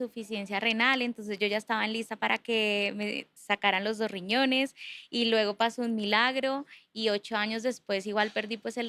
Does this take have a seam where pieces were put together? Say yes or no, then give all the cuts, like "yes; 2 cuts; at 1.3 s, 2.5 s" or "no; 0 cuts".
no; 0 cuts